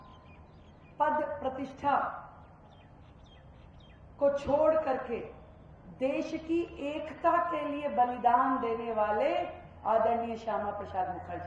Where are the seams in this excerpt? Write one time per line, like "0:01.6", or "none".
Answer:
none